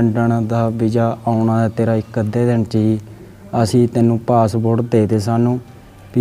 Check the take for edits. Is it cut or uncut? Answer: uncut